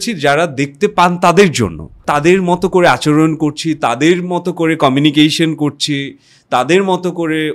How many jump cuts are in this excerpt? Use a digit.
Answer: 1